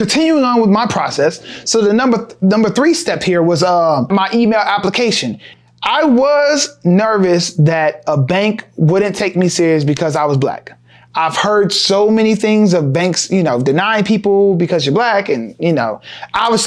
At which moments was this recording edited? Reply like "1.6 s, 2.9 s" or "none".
4.1 s, 5.5 s